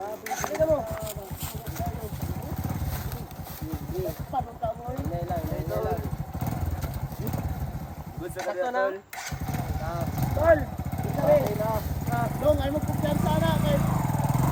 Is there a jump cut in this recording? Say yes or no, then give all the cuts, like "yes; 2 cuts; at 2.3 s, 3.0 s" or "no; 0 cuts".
no; 0 cuts